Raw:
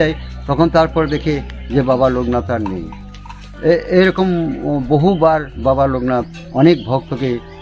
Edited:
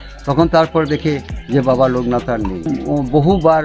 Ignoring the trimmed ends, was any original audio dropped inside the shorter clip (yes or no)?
yes